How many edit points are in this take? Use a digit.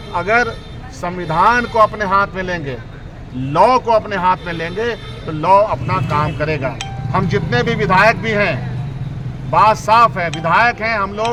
0